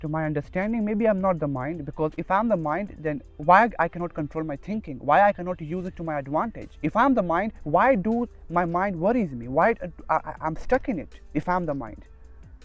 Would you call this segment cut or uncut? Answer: uncut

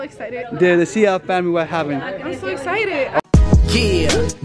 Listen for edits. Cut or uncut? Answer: cut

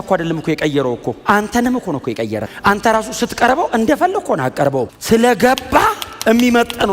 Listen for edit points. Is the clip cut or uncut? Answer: cut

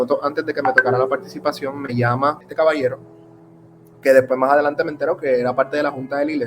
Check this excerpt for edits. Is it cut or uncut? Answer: cut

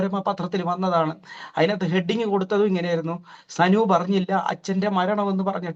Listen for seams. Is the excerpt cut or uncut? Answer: uncut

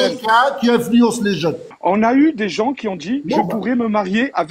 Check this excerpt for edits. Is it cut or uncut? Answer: cut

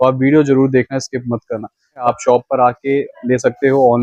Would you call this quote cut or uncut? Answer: cut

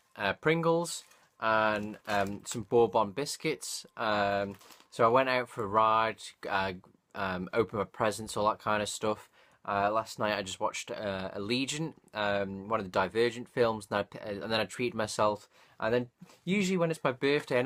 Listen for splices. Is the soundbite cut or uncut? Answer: uncut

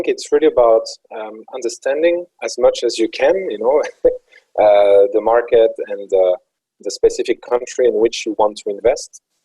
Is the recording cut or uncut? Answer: uncut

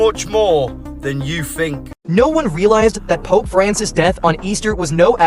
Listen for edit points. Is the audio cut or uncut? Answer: cut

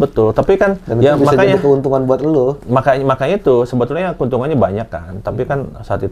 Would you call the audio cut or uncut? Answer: uncut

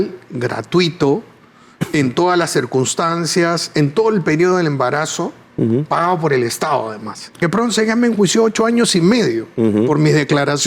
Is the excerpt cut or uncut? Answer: cut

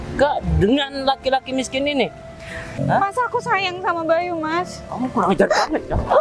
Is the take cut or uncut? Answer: cut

